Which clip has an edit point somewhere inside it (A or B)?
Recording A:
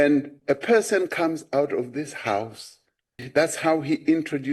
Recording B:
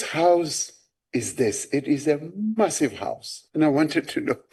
A